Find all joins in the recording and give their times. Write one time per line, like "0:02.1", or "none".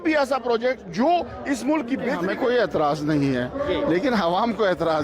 0:02.2